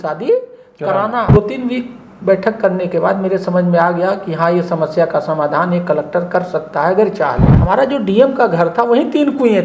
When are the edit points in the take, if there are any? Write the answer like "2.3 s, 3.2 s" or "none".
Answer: 1.3 s, 7.5 s